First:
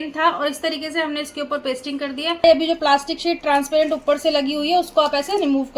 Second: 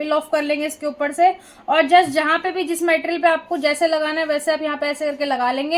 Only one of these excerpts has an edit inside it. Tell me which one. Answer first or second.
first